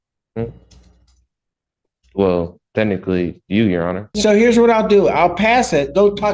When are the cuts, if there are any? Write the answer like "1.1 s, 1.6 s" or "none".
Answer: 4.1 s